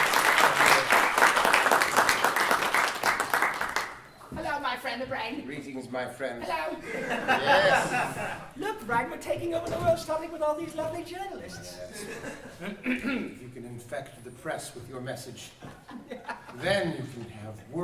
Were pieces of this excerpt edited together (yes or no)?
yes